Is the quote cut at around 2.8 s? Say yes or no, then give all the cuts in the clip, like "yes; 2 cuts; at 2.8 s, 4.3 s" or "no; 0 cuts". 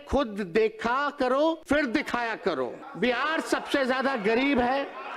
yes; 2 cuts; at 1.6 s, 2.8 s